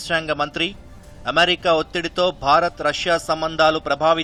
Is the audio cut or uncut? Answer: uncut